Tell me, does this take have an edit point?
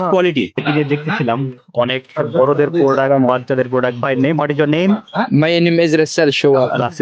no; 0 cuts

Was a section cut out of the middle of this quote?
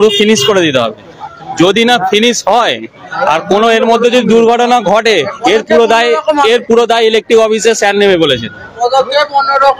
no; 0 cuts

